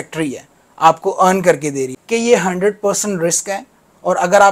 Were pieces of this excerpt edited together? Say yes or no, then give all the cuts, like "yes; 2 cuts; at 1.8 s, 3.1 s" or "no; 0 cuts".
yes; 1 cut; at 1.9 s